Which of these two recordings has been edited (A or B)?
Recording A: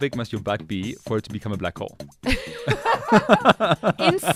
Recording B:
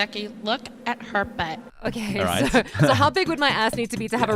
B